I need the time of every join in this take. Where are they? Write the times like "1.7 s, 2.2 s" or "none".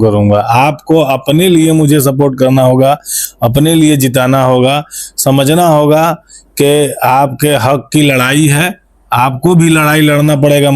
none